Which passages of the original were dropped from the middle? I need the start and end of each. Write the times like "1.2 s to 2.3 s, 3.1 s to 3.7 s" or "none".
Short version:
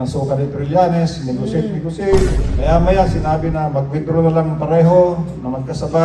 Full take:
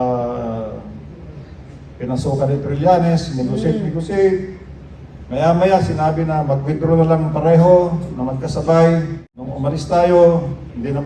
4.6 s to 5.2 s